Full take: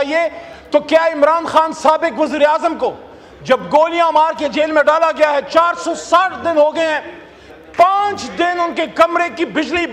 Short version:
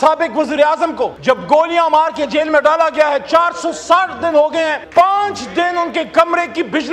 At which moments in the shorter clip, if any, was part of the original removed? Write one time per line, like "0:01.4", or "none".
0:01.2
0:04.8